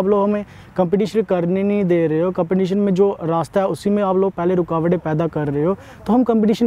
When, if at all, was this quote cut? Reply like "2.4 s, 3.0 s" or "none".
none